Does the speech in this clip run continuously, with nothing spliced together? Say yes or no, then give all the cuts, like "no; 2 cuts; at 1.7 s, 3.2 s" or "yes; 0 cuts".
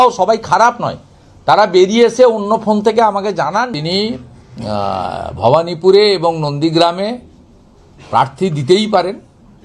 no; 1 cut; at 3.7 s